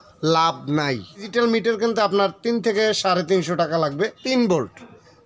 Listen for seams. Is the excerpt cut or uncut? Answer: cut